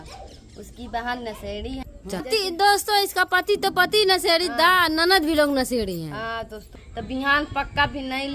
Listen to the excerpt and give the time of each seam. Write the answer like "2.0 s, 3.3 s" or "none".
2.3 s, 6.6 s